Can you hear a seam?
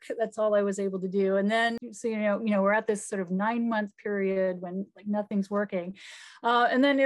yes; 1 cut; at 1.8 s

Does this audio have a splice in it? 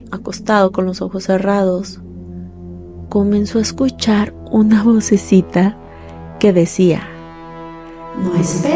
no; 0 cuts

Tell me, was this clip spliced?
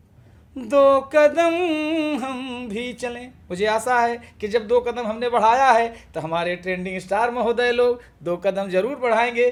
no; 0 cuts

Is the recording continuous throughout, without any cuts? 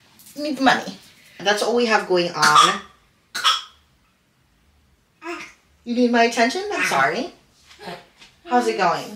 no; 1 cut; at 1.3 s

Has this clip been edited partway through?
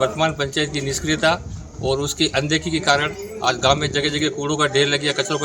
no; 0 cuts

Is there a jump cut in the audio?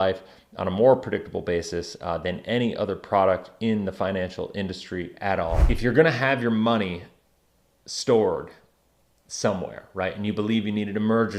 yes; 1 cut; at 5.6 s

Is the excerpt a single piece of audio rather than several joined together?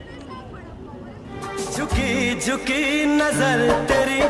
no; 1 cut; at 1.4 s

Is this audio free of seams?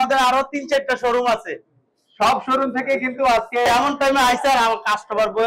yes; 0 cuts

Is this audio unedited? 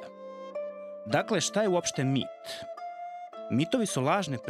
yes; 0 cuts

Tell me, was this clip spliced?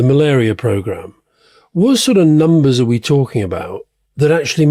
no; 0 cuts

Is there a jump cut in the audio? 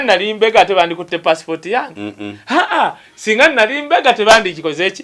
no; 0 cuts

